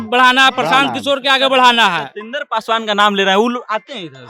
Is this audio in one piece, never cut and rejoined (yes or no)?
yes